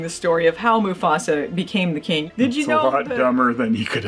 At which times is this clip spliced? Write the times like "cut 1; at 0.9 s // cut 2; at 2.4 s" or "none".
cut 1; at 2.2 s